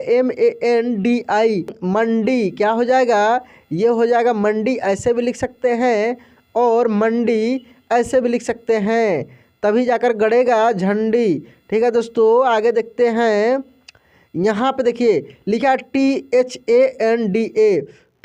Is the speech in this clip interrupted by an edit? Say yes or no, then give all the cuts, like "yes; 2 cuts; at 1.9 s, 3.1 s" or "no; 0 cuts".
yes; 1 cut; at 1.8 s